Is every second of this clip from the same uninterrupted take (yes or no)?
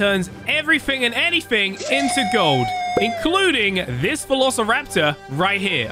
yes